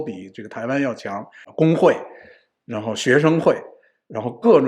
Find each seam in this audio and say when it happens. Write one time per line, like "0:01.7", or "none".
0:01.4

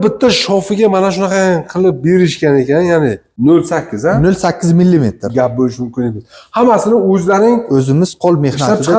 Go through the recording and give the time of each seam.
0:03.2

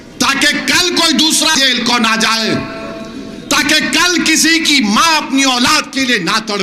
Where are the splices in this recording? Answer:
0:01.5

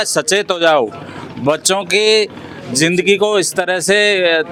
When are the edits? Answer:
none

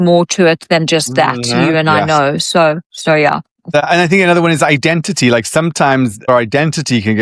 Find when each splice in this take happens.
0:03.8
0:06.2

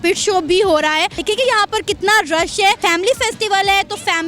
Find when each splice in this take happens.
0:01.2
0:02.8

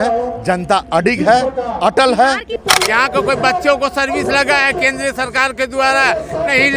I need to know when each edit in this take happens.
0:02.5

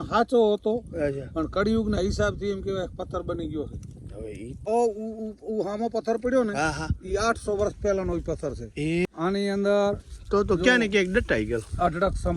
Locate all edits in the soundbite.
0:04.6
0:09.1

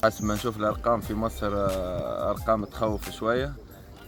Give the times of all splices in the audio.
none

